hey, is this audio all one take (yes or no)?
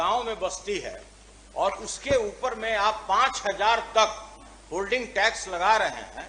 yes